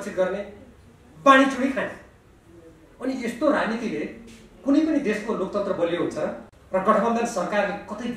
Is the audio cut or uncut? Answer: cut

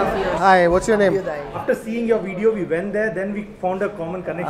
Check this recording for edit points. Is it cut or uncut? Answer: cut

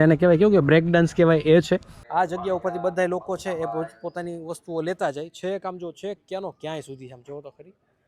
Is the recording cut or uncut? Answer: cut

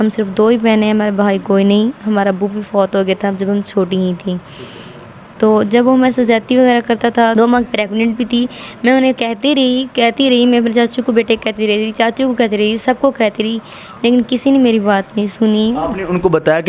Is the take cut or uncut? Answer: cut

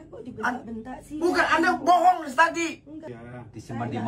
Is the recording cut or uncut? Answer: cut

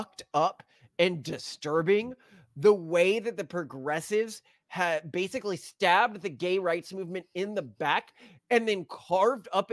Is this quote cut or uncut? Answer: uncut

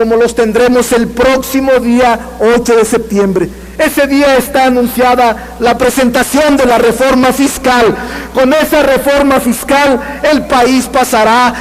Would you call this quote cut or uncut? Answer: cut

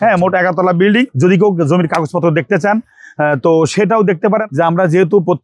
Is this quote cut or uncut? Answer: cut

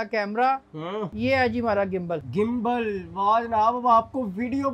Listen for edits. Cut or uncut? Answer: cut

